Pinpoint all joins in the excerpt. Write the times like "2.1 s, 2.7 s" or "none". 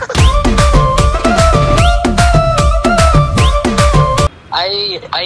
4.3 s